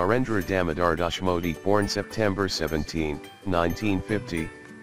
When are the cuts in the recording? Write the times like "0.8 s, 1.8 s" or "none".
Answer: 1.6 s